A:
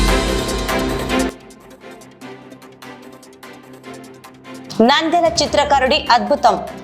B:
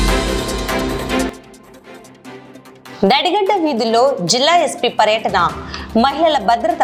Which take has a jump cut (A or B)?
A